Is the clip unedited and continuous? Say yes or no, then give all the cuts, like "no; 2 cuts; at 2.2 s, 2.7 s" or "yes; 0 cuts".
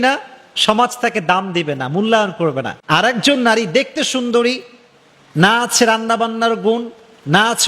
no; 1 cut; at 2.7 s